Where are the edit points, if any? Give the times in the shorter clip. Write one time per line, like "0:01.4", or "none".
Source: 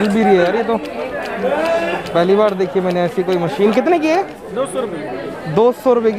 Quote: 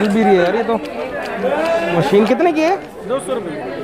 0:01.9